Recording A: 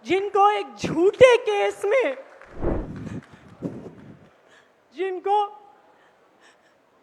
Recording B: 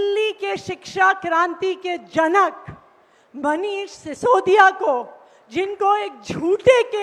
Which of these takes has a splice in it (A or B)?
A